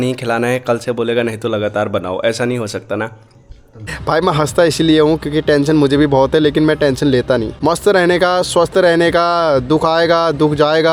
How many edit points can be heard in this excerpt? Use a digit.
2